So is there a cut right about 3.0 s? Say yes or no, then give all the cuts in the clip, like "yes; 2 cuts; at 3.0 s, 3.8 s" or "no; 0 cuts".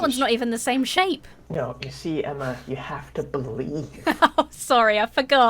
no; 1 cut; at 1.3 s